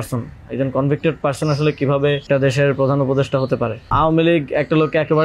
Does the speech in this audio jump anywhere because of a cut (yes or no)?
yes